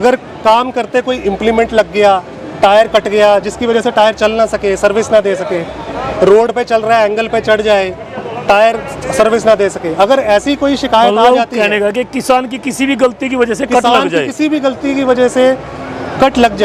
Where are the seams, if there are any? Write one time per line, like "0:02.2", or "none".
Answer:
none